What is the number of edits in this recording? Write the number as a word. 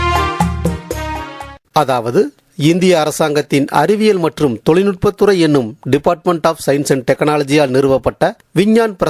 one